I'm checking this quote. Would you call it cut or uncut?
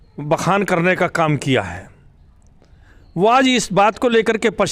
uncut